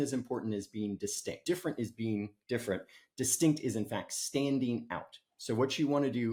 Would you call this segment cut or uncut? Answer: uncut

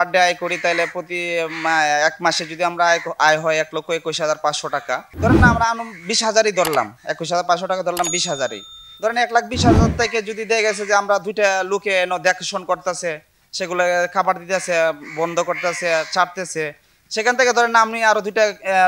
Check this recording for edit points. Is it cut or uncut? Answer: uncut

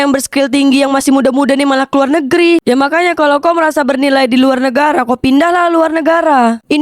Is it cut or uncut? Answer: cut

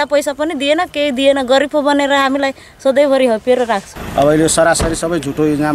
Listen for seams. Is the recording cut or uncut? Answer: cut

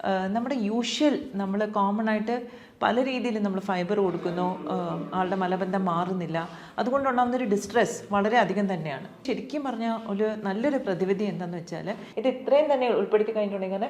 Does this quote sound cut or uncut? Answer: cut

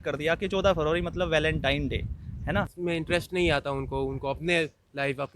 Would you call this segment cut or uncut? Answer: cut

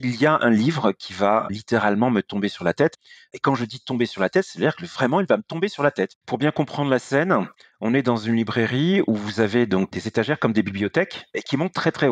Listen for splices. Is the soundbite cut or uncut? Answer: cut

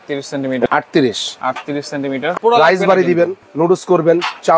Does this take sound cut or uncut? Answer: cut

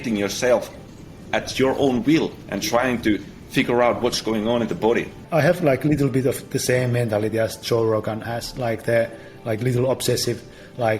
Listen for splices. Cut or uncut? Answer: cut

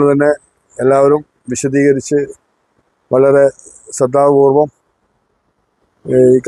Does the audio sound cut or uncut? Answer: uncut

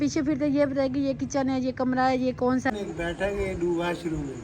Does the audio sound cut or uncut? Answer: cut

